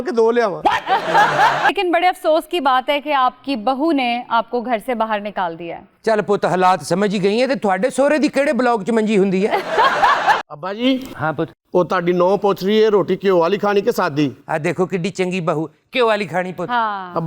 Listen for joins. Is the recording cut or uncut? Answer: cut